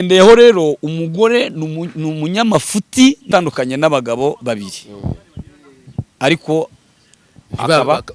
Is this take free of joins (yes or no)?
no